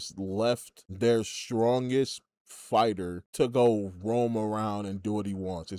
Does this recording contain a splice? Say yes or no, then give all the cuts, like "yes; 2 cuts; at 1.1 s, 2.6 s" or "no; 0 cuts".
no; 0 cuts